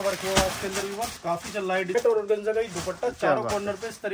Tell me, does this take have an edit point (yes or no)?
yes